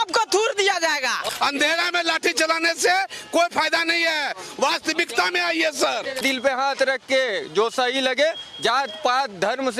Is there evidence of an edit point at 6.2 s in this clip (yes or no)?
yes